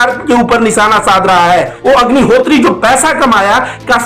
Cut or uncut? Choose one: cut